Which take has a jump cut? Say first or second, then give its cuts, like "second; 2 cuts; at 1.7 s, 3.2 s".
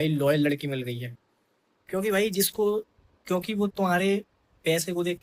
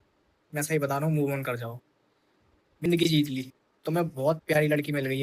second; 1 cut; at 2.9 s